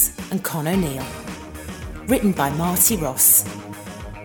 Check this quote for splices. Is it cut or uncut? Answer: cut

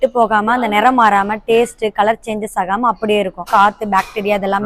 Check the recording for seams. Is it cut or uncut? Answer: cut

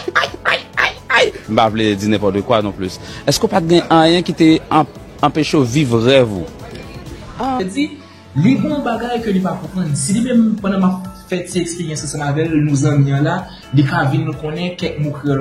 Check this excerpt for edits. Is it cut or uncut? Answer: cut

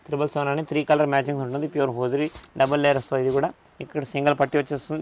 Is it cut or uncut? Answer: uncut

